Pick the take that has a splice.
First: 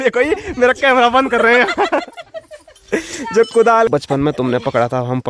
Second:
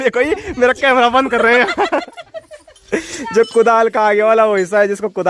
first; 1 cut; at 3.9 s

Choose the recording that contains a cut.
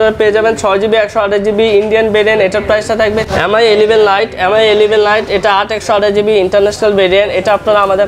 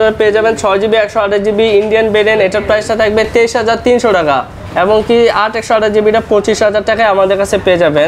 first; 1 cut; at 3.3 s

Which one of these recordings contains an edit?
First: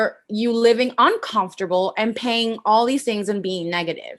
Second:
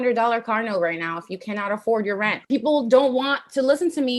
second; 1 cut; at 2.4 s

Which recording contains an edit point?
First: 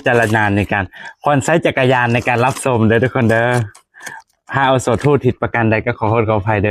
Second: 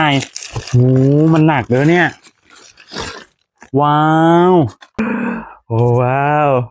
second; 1 cut; at 5.0 s

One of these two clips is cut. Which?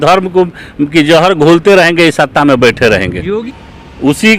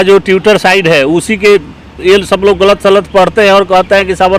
first; 1 cut; at 3.5 s

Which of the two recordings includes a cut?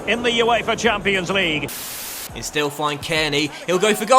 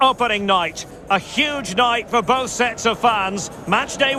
first; 1 cut; at 1.9 s

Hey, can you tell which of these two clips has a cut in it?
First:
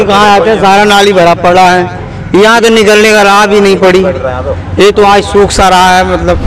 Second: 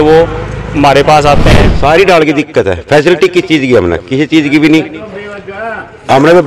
second; 1 cut; at 1.6 s

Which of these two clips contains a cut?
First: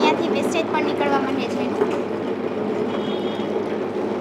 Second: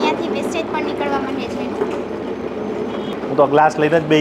second; 1 cut; at 3.1 s

